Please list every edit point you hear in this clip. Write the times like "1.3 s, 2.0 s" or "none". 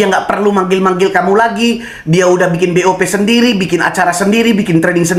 none